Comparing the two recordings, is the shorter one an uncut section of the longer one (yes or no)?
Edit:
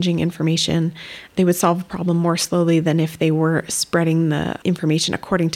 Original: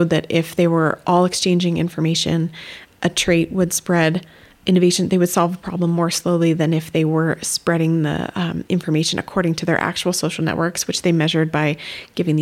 no